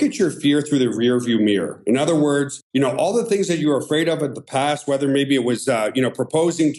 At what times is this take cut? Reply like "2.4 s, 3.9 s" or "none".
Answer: none